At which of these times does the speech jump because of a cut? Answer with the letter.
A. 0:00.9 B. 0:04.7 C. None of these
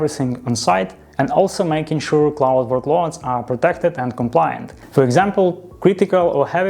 B